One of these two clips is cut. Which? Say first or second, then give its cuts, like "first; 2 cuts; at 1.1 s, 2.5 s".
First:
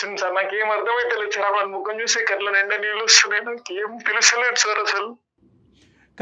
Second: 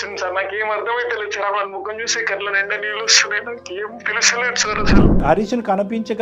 second; 1 cut; at 5.2 s